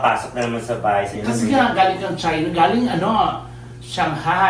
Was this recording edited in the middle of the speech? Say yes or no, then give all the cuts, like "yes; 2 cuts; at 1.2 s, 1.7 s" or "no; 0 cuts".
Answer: yes; 1 cut; at 1.1 s